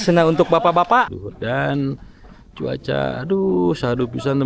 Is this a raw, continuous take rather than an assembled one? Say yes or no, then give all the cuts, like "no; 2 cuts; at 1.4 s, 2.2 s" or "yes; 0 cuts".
no; 1 cut; at 1.1 s